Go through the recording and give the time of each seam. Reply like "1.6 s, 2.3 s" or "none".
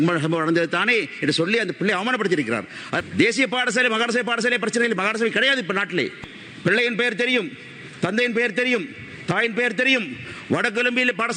3.0 s, 6.2 s